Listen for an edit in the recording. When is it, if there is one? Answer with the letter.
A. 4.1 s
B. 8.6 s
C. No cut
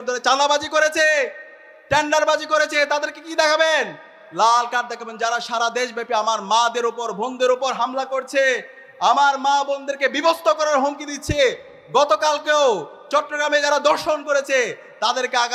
C